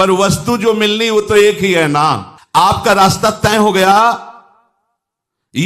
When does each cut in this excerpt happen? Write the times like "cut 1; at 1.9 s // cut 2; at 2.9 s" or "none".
cut 1; at 2.3 s